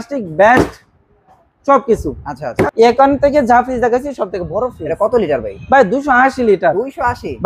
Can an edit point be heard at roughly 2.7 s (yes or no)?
yes